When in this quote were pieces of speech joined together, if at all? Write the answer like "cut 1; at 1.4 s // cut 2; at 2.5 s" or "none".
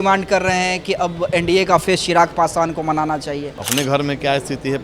cut 1; at 3.5 s